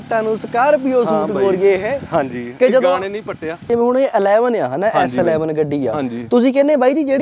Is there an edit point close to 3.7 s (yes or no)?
yes